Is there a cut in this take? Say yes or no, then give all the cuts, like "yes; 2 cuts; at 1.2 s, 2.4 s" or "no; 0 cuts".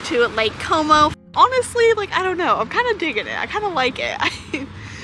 yes; 1 cut; at 1.1 s